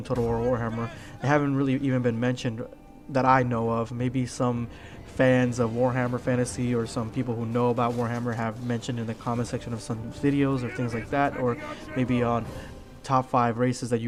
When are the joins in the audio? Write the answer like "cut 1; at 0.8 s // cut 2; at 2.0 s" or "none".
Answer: none